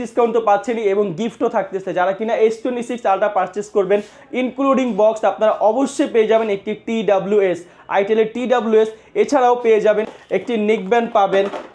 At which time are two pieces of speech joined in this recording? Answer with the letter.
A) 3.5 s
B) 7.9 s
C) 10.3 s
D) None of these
C